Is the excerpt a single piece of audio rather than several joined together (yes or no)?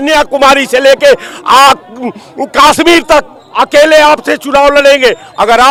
yes